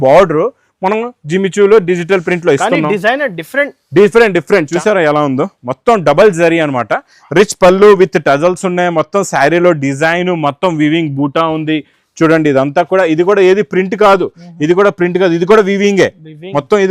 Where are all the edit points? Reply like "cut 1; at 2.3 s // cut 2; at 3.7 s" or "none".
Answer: cut 1; at 4.7 s